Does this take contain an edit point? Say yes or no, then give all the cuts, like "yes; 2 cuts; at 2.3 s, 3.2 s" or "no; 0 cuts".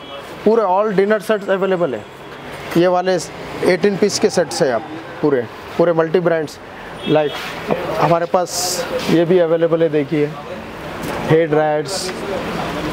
no; 0 cuts